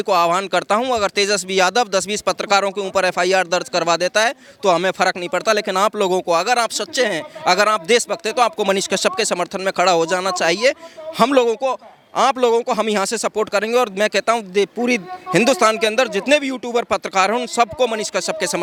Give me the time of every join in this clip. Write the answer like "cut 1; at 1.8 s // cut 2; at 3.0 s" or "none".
none